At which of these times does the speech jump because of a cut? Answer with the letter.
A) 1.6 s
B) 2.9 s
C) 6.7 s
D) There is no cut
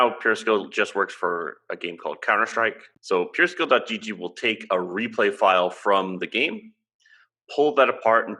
B